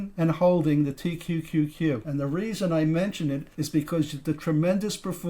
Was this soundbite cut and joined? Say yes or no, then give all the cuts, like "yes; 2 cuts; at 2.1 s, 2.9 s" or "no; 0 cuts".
yes; 2 cuts; at 2.1 s, 3.5 s